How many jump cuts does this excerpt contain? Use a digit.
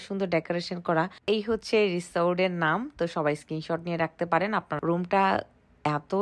2